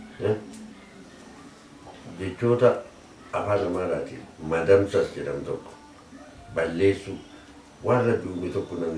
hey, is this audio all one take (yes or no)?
yes